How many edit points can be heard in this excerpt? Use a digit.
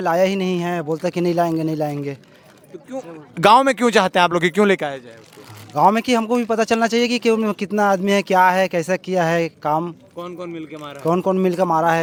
0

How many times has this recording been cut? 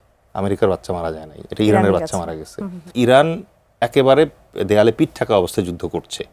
1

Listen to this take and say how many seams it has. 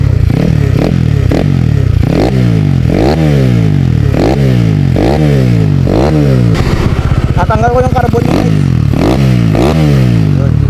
1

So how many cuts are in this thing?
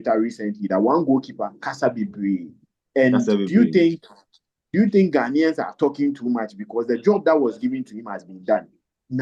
0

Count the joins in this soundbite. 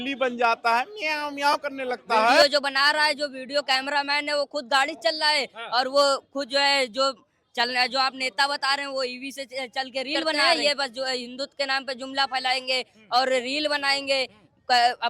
2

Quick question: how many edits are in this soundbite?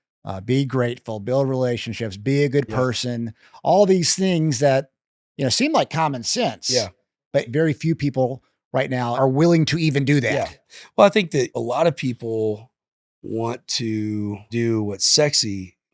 4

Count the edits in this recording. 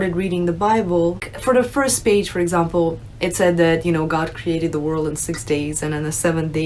1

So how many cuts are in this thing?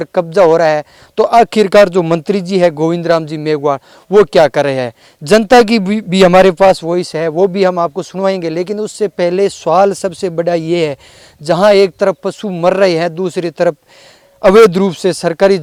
0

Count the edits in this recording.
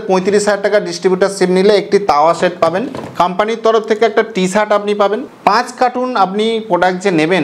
2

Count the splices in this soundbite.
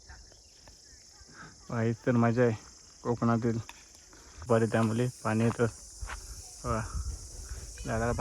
1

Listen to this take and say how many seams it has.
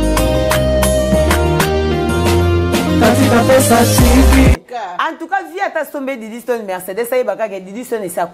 1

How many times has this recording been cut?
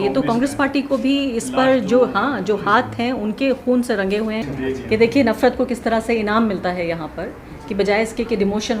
1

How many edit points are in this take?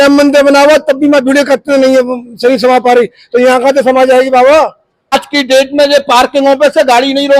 1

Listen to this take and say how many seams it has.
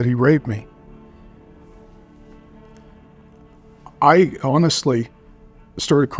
0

